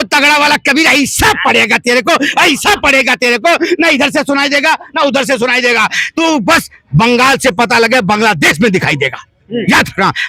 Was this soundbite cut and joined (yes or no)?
no